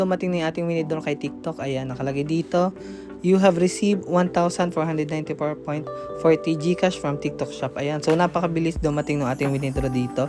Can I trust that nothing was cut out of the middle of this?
yes; 0 cuts

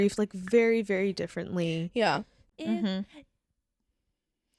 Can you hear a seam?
yes; 1 cut; at 2.5 s

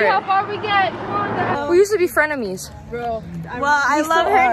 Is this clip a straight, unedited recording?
no; 1 cut; at 1.5 s

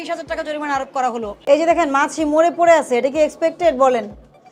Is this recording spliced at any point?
yes; 1 cut; at 1.4 s

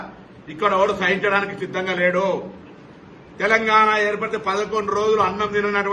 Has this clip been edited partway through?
no; 0 cuts

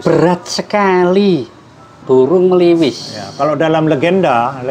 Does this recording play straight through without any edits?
no; 1 cut; at 1.9 s

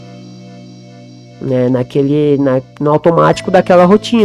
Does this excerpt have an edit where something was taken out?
no; 0 cuts

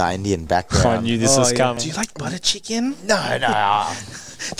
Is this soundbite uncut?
no; 1 cut; at 1.8 s

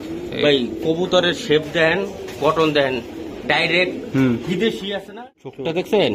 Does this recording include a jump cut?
yes; 1 cut; at 5.0 s

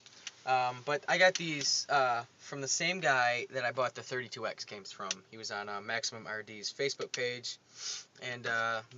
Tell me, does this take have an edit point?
yes; 1 cut; at 5.6 s

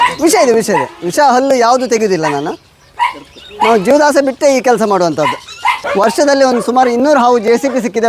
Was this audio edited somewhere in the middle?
yes; 1 cut; at 5.8 s

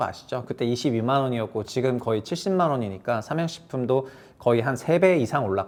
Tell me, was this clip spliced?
no; 0 cuts

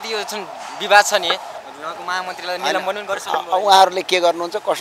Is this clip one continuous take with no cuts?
no; 1 cut; at 1.5 s

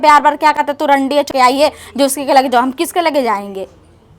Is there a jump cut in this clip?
yes; 1 cut; at 1.3 s

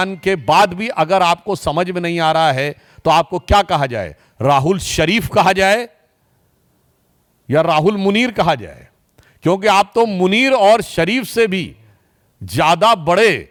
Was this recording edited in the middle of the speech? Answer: no; 0 cuts

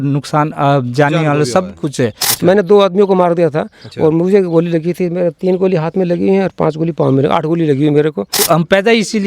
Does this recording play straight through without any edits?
no; 2 cuts; at 2.3 s, 8.4 s

